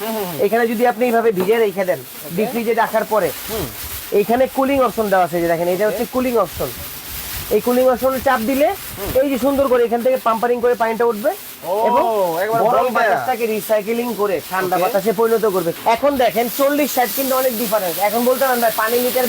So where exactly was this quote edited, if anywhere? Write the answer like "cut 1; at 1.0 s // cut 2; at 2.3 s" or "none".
cut 1; at 15.7 s